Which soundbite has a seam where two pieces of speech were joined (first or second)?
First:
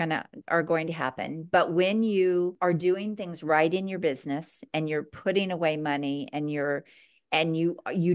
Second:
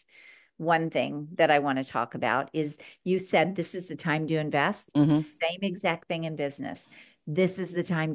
first